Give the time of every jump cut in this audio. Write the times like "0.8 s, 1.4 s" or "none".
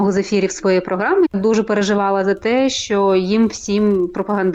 1.3 s